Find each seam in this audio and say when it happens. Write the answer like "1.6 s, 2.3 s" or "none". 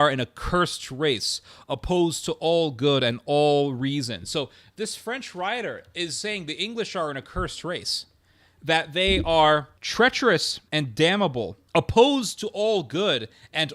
9.8 s, 10.6 s, 11.6 s